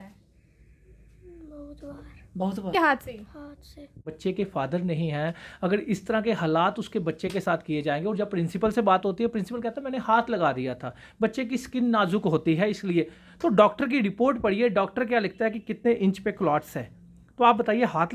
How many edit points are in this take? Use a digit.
2